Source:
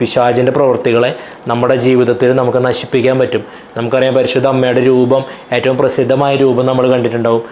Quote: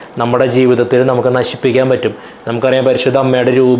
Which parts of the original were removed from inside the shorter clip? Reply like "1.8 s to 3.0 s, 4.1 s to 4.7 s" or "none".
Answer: none